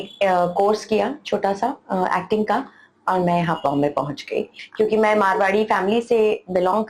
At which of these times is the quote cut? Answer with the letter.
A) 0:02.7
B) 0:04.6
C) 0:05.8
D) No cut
B